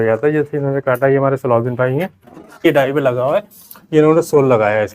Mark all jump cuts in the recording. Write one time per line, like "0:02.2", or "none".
0:02.6